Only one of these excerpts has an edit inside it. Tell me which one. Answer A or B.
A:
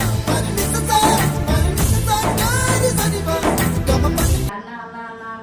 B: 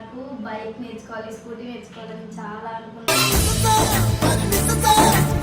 A